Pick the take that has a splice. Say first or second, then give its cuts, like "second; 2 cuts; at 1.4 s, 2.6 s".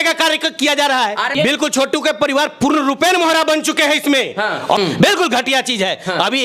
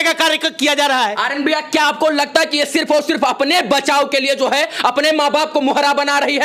first; 2 cuts; at 1.3 s, 4.8 s